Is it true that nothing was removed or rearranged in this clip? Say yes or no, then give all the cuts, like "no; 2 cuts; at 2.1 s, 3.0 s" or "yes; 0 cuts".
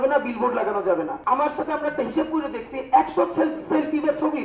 no; 1 cut; at 1.1 s